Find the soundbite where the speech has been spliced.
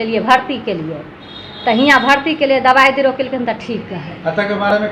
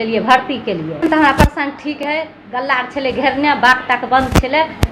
second; 1 cut; at 1.0 s

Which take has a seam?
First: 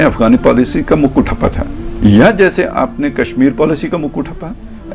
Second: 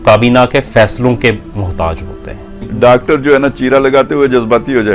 second; 1 cut; at 2.7 s

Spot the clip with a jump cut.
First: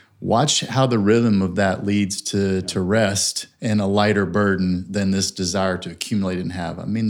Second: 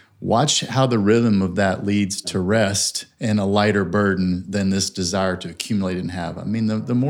second; 1 cut; at 2.2 s

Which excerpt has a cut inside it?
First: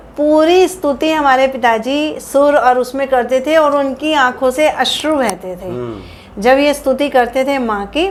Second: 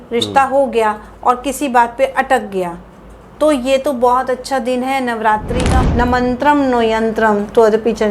second; 1 cut; at 5.8 s

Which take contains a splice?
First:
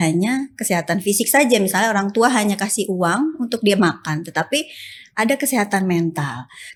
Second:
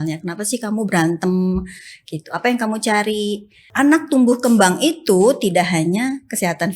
second; 1 cut; at 3.6 s

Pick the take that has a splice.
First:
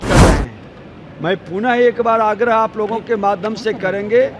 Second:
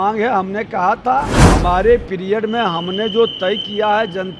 second; 1 cut; at 1.4 s

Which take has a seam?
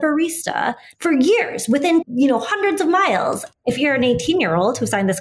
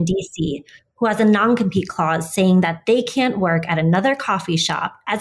first; 3 cuts; at 0.9 s, 2.1 s, 3.4 s

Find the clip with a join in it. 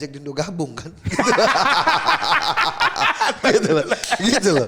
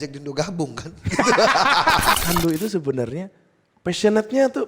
second; 1 cut; at 2.2 s

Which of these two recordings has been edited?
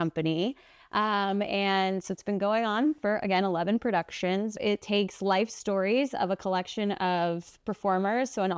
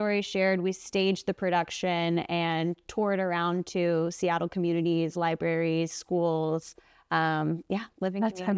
first; 1 cut; at 4.5 s

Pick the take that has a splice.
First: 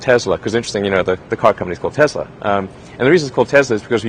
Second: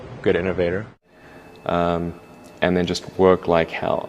first; 1 cut; at 2.3 s

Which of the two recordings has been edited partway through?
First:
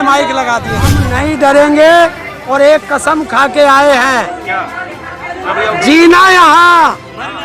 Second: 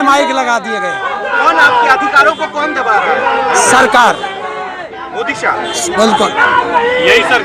first; 1 cut; at 1.1 s

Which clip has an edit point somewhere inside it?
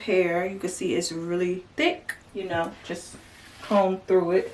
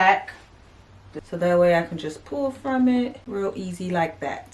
second; 2 cuts; at 1.1 s, 3.2 s

